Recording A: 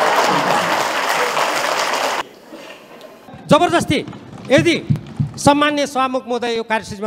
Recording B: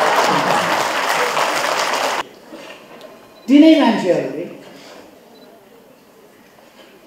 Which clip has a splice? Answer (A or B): A